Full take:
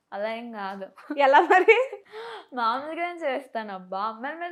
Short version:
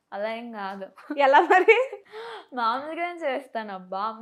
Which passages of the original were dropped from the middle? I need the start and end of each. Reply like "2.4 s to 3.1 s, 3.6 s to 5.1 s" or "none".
none